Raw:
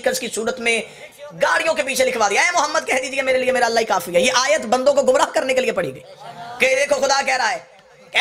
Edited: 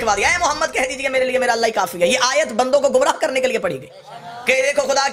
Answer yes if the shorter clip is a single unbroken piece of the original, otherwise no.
yes